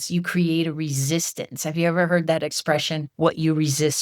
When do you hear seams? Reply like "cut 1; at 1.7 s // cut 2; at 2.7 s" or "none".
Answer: cut 1; at 3.0 s